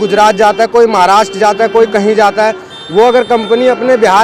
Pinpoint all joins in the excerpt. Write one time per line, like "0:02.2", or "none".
none